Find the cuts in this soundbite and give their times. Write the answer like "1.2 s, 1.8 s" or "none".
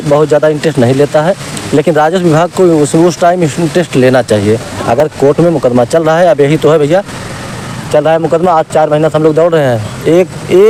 none